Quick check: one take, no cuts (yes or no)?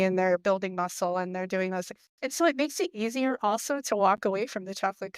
yes